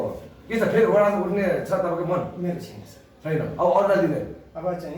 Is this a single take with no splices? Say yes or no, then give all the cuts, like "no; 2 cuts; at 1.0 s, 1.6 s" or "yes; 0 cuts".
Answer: yes; 0 cuts